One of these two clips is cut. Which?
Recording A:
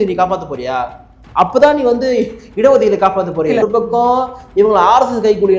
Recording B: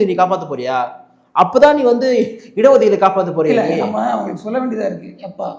A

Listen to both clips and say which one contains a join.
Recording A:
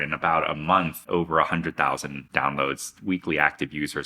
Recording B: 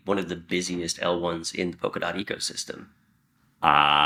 A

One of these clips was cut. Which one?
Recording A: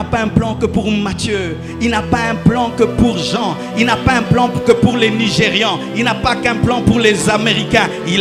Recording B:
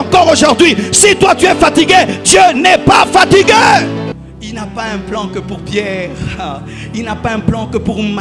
B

